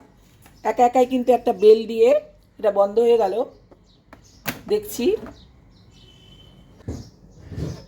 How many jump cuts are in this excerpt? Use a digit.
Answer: 1